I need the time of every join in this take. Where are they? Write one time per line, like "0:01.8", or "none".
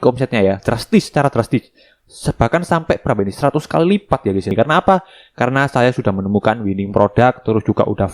0:04.5